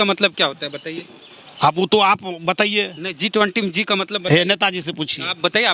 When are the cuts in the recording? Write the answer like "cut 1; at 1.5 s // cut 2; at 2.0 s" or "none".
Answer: none